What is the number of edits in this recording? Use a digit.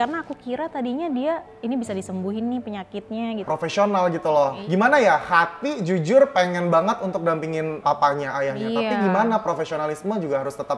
3